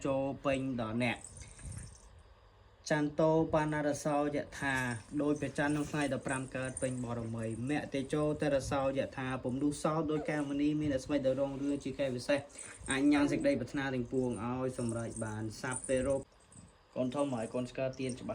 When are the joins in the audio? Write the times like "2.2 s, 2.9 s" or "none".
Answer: 16.2 s